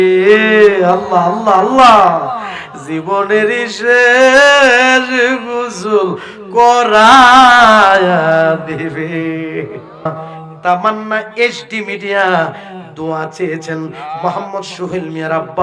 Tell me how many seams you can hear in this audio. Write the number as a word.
one